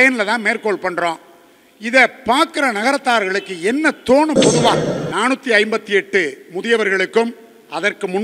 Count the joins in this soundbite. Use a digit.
1